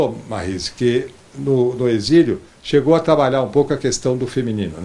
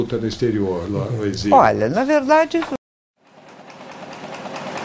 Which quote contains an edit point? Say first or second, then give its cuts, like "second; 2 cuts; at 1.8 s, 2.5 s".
second; 1 cut; at 2.8 s